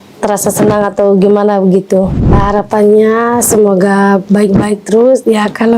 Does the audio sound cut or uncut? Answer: cut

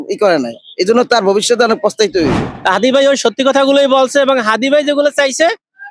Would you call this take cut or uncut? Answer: cut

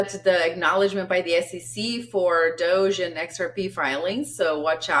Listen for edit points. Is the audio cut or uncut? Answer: uncut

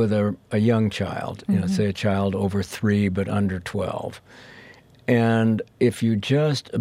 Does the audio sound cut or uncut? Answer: cut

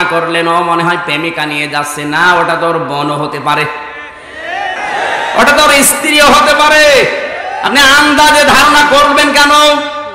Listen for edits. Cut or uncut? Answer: cut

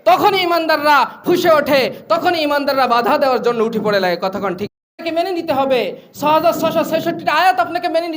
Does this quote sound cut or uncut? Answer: cut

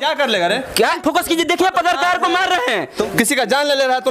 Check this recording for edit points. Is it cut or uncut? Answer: cut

